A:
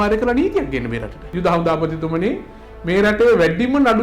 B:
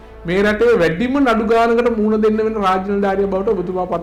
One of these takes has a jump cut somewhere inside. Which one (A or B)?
A